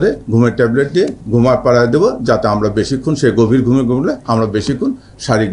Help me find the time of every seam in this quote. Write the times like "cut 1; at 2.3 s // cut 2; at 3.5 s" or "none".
none